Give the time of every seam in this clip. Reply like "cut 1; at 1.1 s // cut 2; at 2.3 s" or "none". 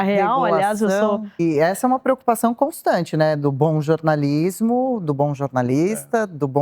cut 1; at 1.4 s